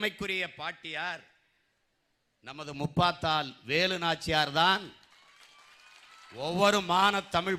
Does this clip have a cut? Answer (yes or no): no